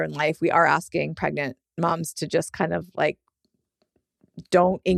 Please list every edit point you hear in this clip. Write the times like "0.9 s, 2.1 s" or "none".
none